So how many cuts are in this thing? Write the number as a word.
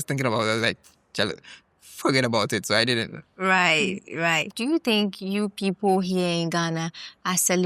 one